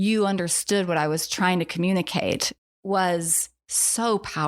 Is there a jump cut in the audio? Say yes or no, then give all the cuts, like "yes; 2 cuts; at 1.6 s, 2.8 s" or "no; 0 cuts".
yes; 1 cut; at 2.5 s